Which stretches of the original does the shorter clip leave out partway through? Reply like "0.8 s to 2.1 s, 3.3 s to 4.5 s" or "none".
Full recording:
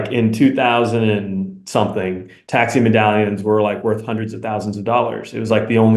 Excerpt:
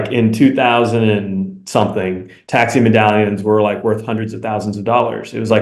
none